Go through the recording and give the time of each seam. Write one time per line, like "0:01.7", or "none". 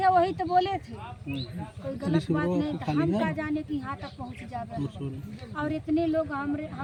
none